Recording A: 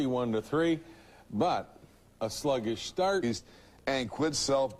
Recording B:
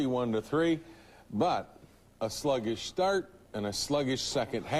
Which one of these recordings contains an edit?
B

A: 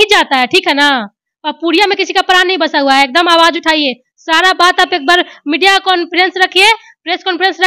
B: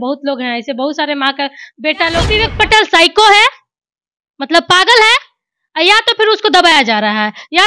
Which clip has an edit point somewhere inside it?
B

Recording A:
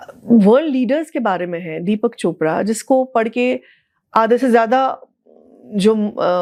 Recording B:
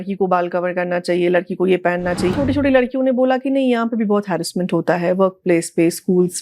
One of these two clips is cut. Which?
B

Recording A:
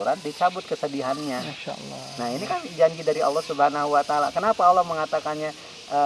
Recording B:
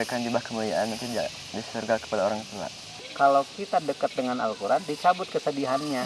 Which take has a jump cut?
B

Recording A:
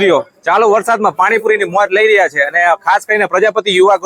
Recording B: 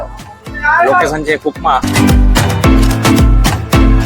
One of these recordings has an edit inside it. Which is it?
B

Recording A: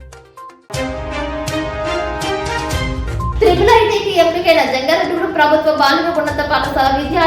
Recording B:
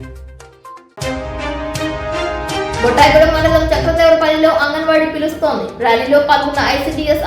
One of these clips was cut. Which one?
B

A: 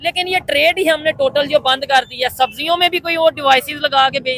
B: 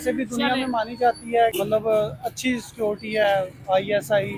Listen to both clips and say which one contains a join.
B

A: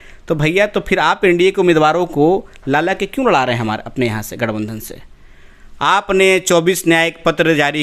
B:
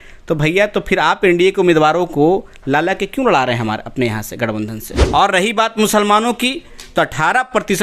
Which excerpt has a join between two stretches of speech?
B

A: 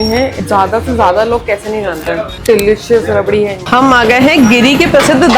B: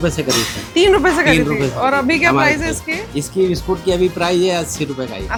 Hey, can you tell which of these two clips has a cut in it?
A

